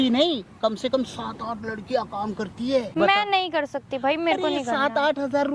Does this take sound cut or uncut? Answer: cut